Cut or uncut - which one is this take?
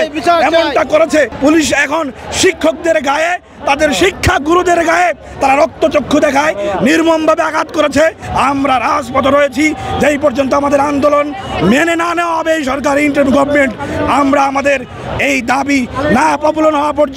cut